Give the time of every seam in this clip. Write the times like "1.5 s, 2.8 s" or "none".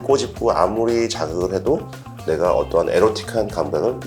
none